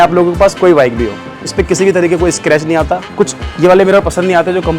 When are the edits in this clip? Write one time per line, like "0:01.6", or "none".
0:01.5
0:03.0